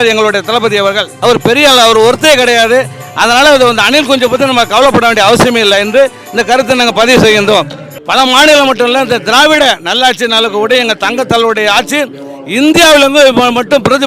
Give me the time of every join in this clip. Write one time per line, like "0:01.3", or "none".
0:01.1
0:08.0